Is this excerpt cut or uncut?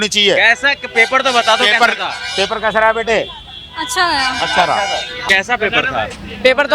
cut